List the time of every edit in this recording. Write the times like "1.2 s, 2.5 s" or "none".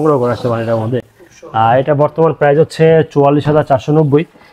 none